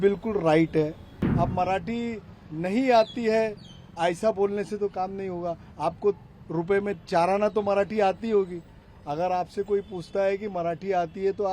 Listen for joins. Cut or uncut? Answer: cut